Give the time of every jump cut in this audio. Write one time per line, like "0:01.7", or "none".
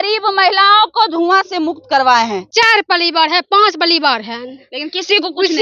0:02.5

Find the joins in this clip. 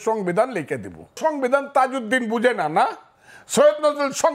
0:01.2

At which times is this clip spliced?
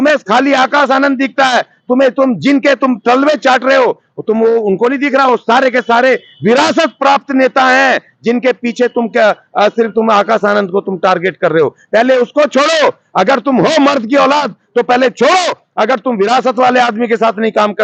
none

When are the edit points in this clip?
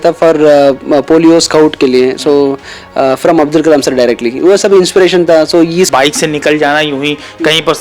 0:05.9

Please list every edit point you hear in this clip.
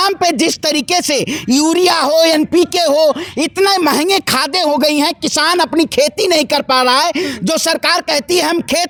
none

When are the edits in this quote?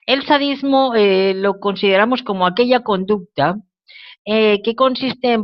0:03.7

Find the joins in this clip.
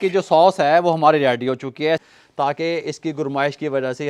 0:02.0

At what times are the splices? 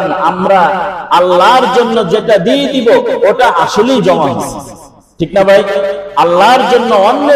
none

